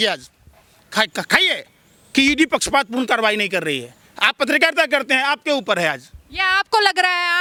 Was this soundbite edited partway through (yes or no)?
no